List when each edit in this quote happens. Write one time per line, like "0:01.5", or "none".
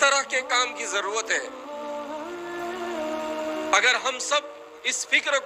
0:01.6
0:03.7